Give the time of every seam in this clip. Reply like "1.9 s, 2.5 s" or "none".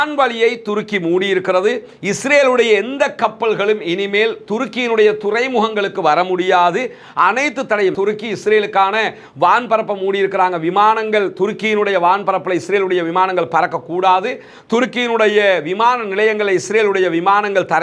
none